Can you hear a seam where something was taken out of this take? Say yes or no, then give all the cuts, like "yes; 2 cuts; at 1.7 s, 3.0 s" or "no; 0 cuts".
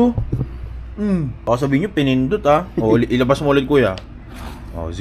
yes; 1 cut; at 1.3 s